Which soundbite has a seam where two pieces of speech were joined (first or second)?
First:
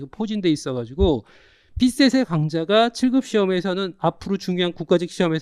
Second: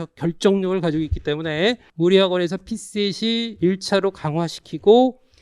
second